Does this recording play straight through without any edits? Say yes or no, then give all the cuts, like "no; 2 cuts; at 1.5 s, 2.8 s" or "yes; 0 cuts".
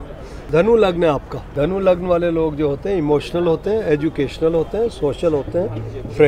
yes; 0 cuts